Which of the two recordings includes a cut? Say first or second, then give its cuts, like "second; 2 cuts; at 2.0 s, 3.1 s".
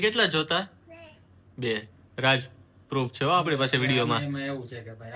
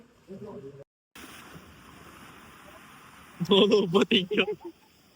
second; 1 cut; at 1.0 s